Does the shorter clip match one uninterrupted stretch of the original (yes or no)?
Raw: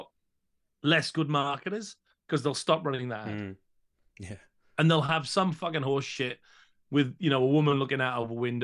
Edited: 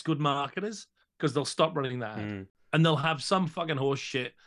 no